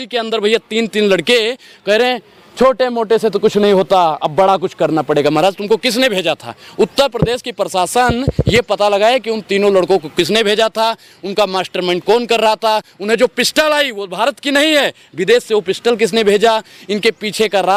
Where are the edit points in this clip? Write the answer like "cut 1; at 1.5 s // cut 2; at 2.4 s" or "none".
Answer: none